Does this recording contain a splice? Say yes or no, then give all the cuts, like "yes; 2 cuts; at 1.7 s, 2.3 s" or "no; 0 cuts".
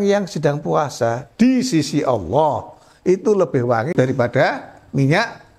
yes; 1 cut; at 3.9 s